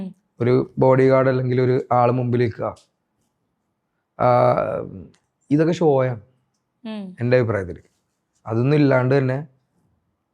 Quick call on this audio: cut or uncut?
uncut